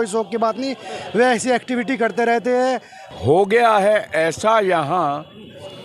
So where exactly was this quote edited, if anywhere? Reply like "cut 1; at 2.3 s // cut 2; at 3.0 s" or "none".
cut 1; at 3.0 s